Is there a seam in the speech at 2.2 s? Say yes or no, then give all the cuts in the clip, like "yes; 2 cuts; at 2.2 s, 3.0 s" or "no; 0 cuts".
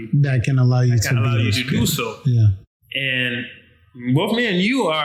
no; 0 cuts